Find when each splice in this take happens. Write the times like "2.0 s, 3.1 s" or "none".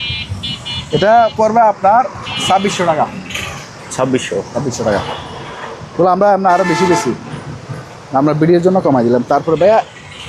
none